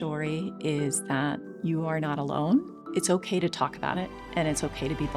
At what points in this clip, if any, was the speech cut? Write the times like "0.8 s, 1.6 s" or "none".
1.5 s, 4.2 s